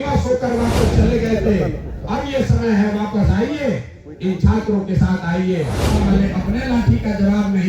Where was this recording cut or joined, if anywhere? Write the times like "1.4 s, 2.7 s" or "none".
5.9 s